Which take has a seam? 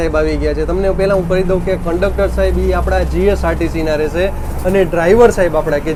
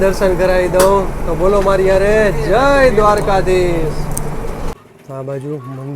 second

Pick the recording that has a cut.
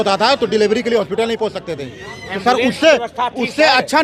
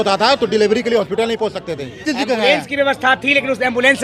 second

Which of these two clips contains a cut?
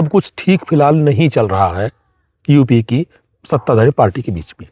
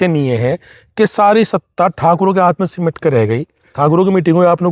second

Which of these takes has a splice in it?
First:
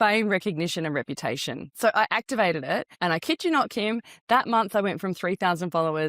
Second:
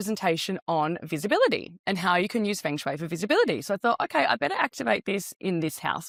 first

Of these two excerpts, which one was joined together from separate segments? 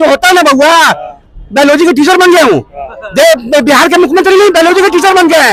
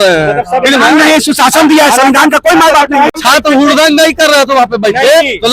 second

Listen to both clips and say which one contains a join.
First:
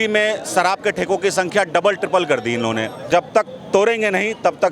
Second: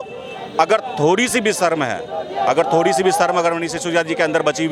first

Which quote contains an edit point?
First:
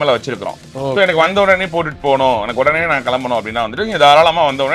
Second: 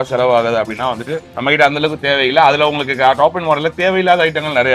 second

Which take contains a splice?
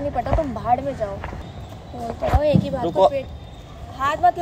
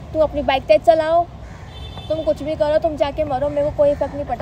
first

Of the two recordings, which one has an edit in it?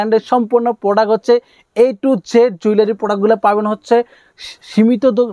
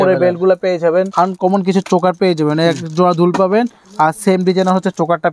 second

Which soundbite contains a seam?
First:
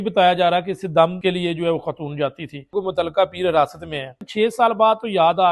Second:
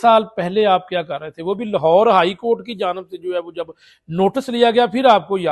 first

